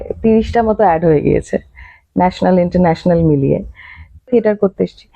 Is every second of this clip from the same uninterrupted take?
no; 1 cut; at 4.3 s

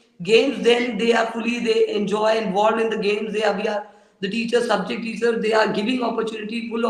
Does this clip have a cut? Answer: no; 0 cuts

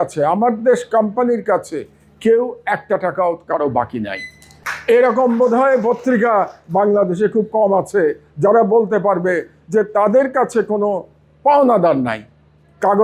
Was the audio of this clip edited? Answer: no; 0 cuts

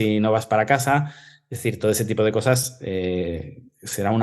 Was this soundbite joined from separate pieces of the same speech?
no; 0 cuts

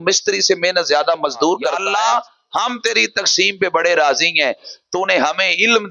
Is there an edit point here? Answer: yes; 1 cut; at 1.8 s

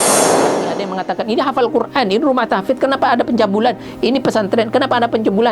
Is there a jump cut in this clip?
yes; 1 cut; at 0.9 s

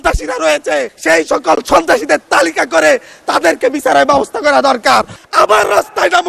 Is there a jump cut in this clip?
yes; 2 cuts; at 0.9 s, 5.2 s

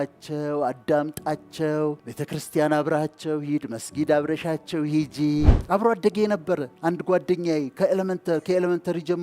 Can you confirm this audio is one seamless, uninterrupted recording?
no; 2 cuts; at 2.1 s, 5.6 s

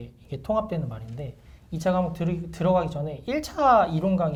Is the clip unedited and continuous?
yes; 0 cuts

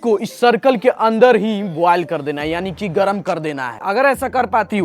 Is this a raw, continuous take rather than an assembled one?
no; 1 cut; at 3.7 s

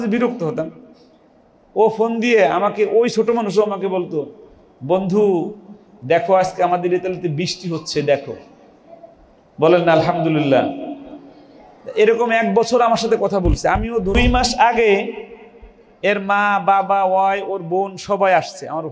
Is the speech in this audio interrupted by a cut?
yes; 1 cut; at 14.2 s

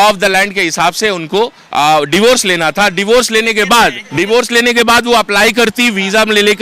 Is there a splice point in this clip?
yes; 1 cut; at 4.0 s

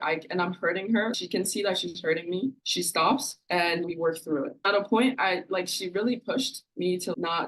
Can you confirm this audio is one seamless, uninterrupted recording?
no; 1 cut; at 4.6 s

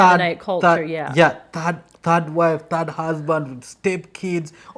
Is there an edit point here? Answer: no; 0 cuts

